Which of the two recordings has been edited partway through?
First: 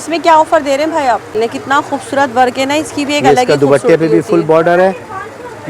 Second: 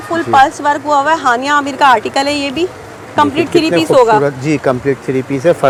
first; 1 cut; at 1.3 s

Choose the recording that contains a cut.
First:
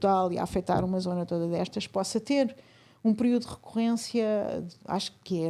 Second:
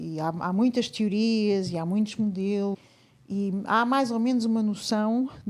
second; 1 cut; at 2.8 s

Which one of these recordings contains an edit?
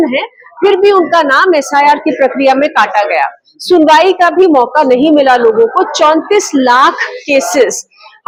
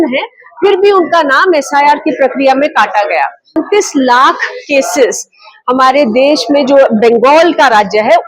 second; 1 cut; at 3.6 s

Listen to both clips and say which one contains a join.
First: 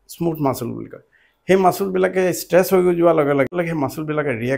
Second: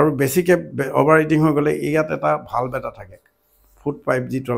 first; 1 cut; at 3.5 s

